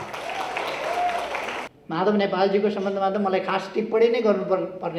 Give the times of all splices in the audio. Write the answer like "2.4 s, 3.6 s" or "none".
1.7 s